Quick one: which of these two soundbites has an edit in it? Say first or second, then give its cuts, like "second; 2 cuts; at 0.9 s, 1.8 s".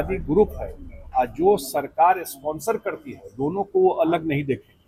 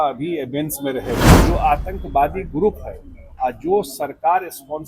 second; 1 cut; at 1.2 s